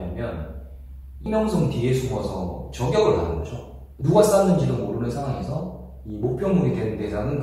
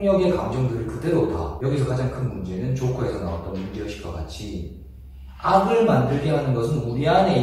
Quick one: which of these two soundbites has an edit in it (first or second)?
second